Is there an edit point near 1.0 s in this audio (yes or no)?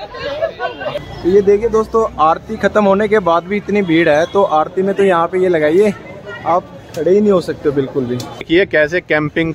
yes